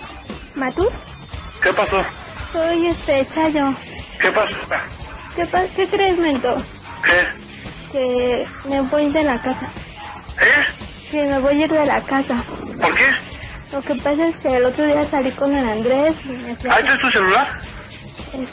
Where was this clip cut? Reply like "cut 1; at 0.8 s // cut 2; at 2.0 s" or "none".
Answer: cut 1; at 14.4 s